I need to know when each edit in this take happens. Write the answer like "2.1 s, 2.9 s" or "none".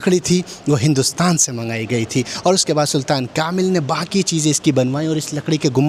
none